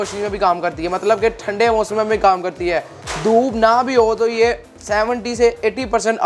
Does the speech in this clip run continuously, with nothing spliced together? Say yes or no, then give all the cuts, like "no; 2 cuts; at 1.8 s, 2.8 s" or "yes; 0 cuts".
yes; 0 cuts